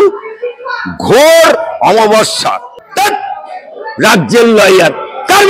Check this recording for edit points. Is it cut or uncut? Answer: cut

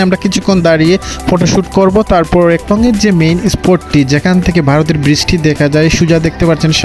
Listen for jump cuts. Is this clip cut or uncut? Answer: cut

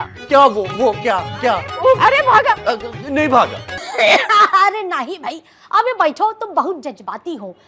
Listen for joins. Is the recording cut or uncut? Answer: cut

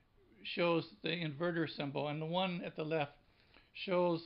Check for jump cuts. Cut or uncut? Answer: cut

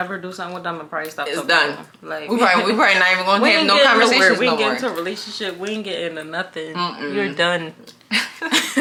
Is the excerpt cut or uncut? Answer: uncut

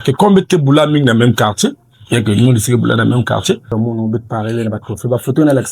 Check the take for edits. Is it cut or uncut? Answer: cut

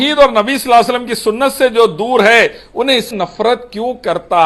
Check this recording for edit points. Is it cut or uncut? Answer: cut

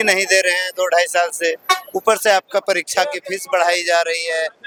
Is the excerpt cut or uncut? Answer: uncut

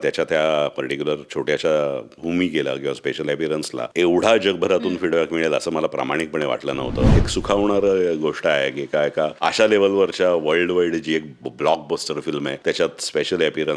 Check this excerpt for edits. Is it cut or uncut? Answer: cut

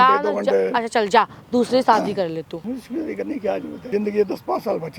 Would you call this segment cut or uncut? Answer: cut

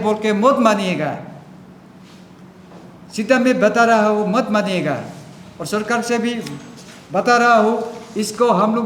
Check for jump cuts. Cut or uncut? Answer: uncut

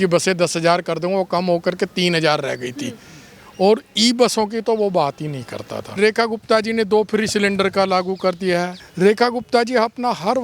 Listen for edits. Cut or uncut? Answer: cut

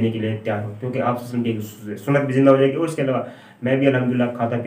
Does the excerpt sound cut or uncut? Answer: uncut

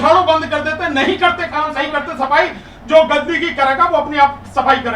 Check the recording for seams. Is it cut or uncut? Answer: cut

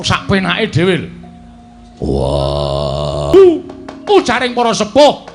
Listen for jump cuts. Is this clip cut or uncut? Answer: cut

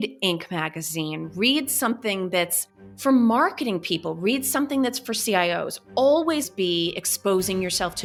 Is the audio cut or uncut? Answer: uncut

